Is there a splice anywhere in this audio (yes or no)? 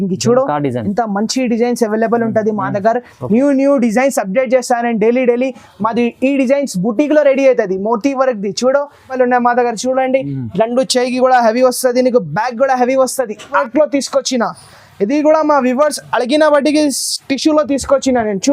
yes